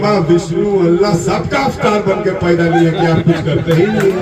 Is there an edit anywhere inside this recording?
no; 0 cuts

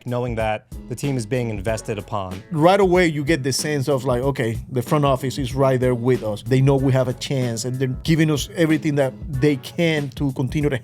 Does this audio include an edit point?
yes; 3 cuts; at 2.4 s, 6.4 s, 8.0 s

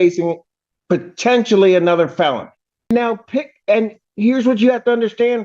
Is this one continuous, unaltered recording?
no; 1 cut; at 2.9 s

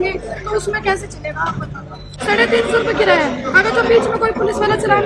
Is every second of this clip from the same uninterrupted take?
no; 1 cut; at 2.1 s

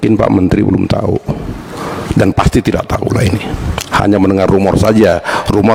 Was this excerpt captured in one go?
yes; 0 cuts

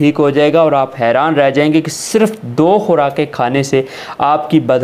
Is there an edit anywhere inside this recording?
no; 0 cuts

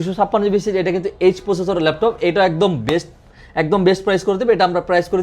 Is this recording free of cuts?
yes; 0 cuts

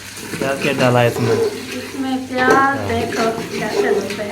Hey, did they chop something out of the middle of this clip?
yes; 1 cut; at 2.8 s

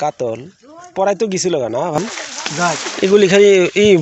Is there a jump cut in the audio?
yes; 1 cut; at 2.0 s

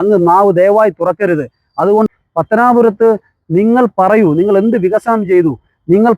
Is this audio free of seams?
no; 1 cut; at 2.1 s

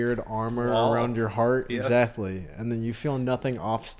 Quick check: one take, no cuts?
yes; 0 cuts

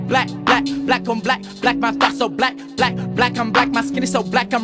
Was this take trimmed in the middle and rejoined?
no; 0 cuts

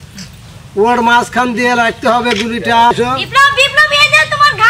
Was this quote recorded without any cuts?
no; 1 cut; at 2.9 s

